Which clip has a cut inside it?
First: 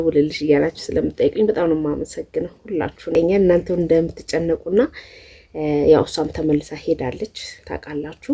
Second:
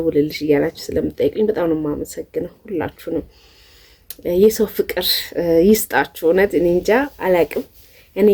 first; 1 cut; at 3.1 s

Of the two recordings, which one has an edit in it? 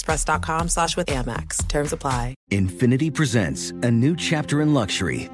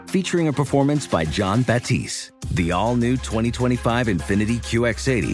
first; 1 cut; at 2.3 s

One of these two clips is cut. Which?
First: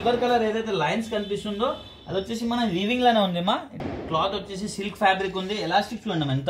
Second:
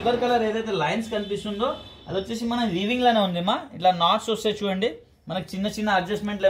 first; 1 cut; at 3.8 s

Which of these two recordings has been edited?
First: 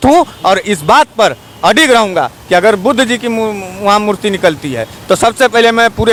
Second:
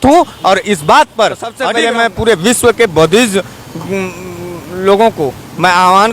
second; 1 cut; at 1.6 s

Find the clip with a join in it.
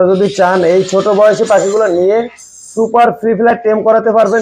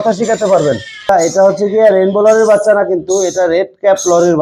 second; 1 cut; at 1.1 s

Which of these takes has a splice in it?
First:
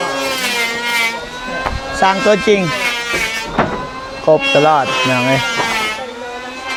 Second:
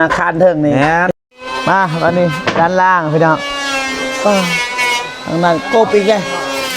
second; 1 cut; at 1.1 s

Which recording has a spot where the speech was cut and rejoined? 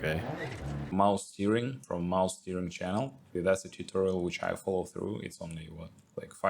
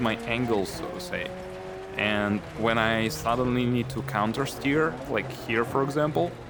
first; 3 cuts; at 0.9 s, 1.8 s, 3.4 s

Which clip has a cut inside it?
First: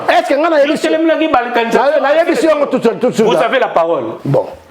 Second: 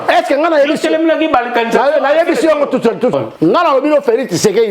second; 1 cut; at 3.1 s

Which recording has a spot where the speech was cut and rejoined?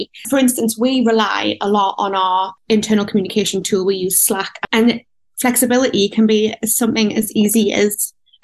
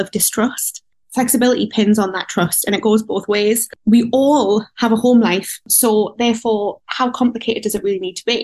second; 3 cuts; at 1.0 s, 3.7 s, 5.5 s

